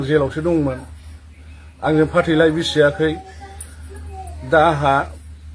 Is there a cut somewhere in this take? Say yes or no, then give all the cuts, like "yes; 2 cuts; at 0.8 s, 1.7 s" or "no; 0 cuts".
no; 0 cuts